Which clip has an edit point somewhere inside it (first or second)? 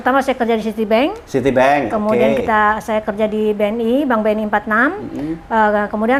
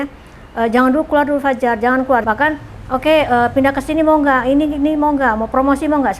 second